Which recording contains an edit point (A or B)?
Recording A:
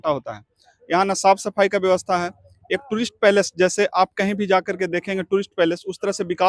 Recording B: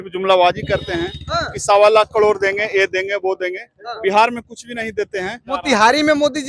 B